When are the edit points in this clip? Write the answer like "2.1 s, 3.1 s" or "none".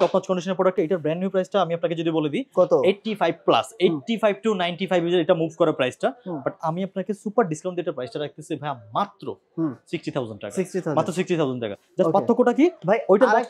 none